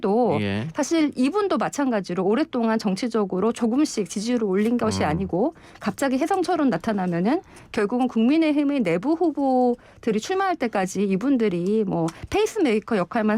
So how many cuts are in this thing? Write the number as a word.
zero